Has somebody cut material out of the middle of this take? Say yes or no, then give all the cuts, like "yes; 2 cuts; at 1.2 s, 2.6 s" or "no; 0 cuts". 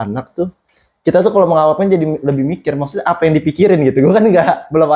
no; 0 cuts